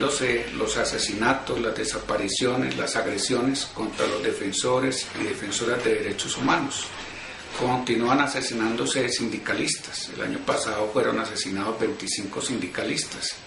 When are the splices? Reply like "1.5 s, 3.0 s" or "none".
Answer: none